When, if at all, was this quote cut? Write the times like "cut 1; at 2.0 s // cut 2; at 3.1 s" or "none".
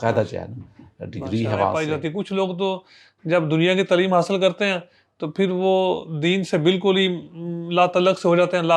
cut 1; at 1.8 s